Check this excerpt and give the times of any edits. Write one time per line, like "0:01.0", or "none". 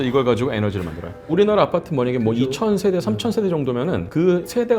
0:01.3